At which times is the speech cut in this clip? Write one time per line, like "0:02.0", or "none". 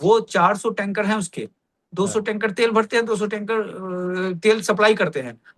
none